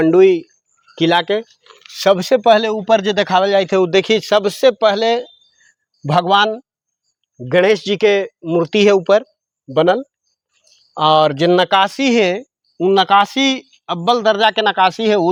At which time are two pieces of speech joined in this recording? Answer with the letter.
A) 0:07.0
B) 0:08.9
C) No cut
C